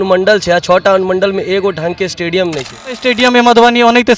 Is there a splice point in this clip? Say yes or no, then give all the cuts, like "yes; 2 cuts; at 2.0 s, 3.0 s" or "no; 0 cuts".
yes; 1 cut; at 3.1 s